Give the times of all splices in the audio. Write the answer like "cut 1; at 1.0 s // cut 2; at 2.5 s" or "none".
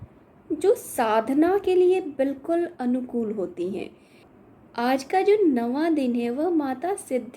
cut 1; at 4.3 s